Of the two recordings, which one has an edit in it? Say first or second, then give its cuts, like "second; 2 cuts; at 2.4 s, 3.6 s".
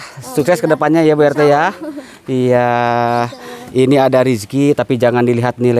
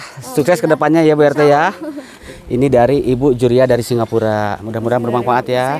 second; 1 cut; at 2.2 s